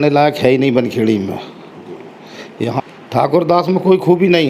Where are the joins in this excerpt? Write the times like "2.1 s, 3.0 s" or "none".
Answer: 2.8 s